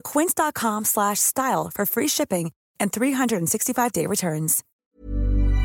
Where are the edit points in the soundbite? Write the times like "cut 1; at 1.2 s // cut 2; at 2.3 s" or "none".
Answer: cut 1; at 4.7 s